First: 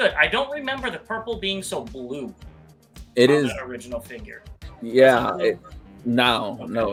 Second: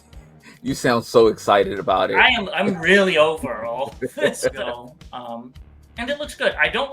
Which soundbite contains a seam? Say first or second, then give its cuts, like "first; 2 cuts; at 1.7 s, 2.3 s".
second; 1 cut; at 4.7 s